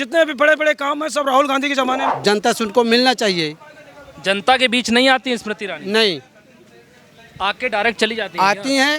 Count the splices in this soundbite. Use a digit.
1